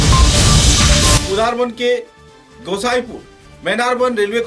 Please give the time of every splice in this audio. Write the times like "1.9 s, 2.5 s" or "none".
none

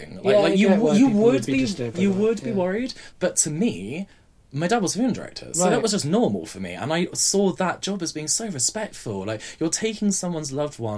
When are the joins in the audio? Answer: 3.1 s

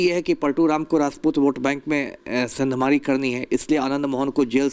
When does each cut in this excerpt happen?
none

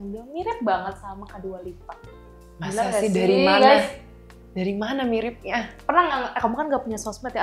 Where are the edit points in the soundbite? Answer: none

